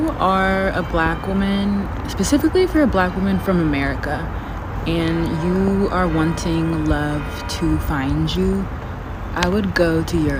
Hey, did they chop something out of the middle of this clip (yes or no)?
no